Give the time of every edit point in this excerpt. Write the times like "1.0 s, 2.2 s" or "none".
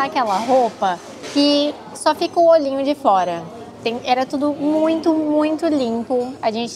none